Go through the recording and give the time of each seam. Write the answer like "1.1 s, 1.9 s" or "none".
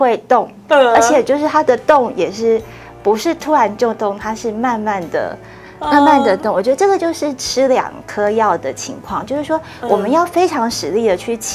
none